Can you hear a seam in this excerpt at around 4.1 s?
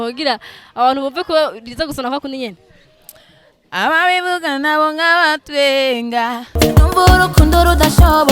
no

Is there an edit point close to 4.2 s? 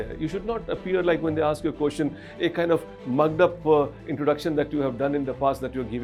no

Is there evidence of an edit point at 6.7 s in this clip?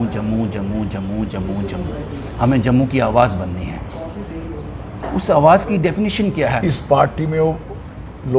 yes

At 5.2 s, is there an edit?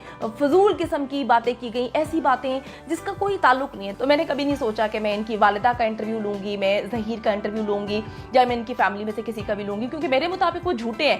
no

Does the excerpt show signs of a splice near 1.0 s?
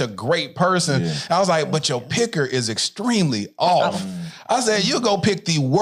no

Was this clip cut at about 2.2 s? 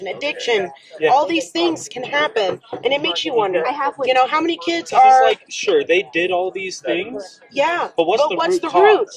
no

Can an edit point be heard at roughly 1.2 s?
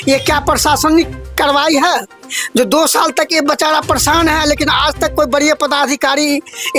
no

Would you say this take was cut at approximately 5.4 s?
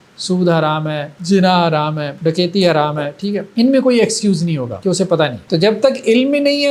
yes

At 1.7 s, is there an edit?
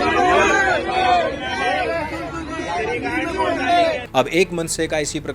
no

